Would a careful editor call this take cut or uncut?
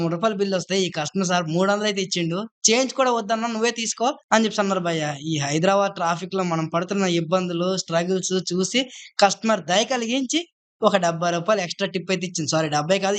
uncut